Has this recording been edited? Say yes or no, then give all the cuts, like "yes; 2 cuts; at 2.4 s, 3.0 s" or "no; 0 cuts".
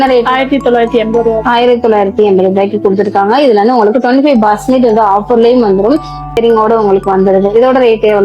yes; 1 cut; at 6.4 s